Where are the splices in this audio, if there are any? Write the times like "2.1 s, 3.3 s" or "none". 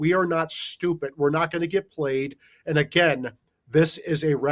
none